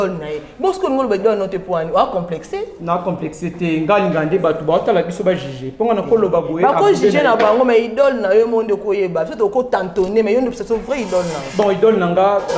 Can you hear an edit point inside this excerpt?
no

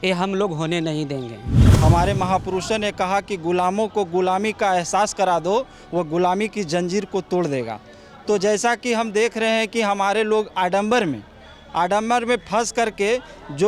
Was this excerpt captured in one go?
no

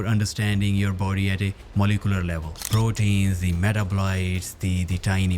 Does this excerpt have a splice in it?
yes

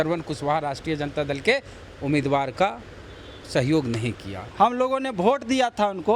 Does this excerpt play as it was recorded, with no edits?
no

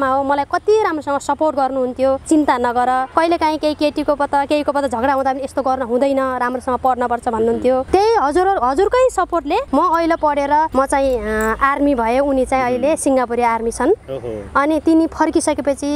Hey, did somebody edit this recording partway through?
no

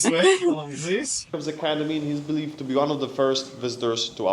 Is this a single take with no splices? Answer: no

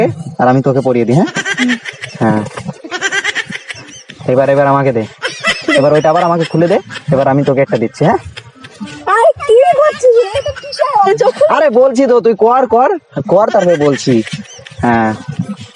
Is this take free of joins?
yes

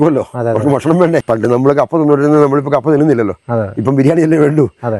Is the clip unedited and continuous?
no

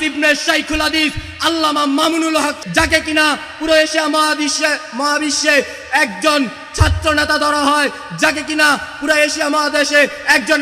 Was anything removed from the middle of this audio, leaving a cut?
yes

